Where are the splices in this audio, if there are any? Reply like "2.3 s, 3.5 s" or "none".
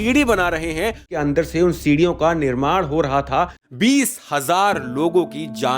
1.2 s, 3.6 s

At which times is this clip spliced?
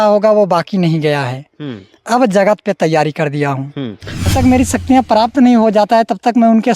4.3 s

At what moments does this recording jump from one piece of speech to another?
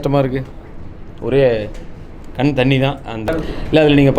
3.2 s

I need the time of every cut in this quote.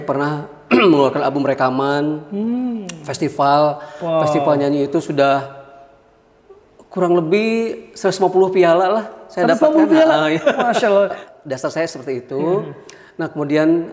11.2 s

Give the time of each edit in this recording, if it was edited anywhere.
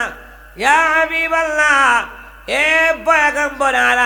none

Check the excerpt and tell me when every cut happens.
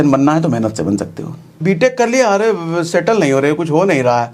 1.6 s

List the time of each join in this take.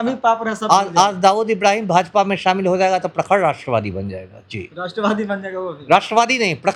none

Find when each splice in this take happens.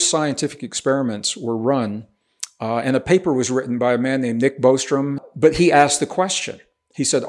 5.2 s

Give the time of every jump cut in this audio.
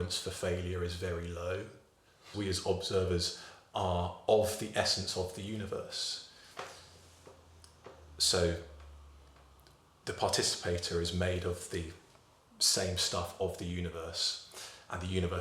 2.3 s

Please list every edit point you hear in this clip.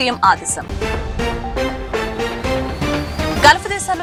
none

